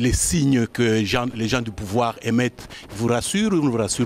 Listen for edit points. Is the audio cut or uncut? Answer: uncut